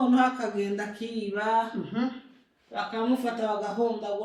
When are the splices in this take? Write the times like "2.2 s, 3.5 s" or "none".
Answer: none